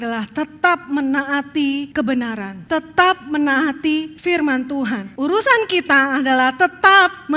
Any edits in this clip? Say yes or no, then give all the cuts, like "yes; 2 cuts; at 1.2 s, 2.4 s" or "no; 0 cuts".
yes; 4 cuts; at 1.9 s, 2.5 s, 4.1 s, 5.1 s